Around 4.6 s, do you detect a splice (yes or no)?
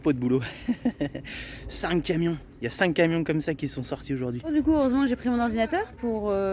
yes